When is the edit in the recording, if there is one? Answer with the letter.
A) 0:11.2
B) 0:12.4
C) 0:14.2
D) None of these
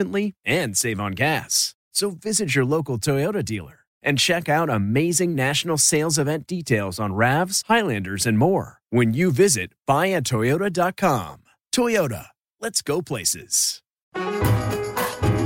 C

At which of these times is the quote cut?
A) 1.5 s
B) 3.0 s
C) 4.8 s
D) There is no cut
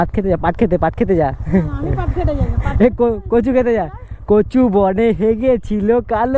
D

